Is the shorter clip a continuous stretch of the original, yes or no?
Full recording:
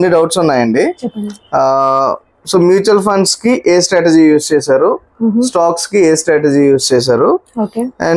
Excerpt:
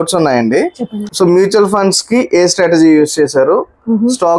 no